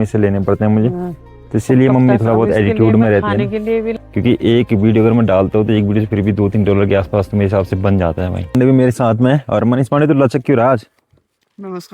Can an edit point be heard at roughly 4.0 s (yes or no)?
yes